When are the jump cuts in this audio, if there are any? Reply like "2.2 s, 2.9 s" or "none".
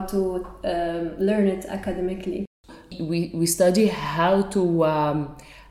2.9 s